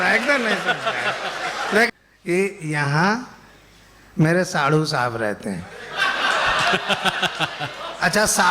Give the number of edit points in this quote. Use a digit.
1